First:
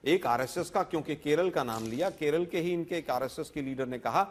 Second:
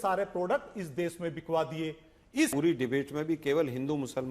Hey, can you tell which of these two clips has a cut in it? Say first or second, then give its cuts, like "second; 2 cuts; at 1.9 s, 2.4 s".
second; 1 cut; at 2.5 s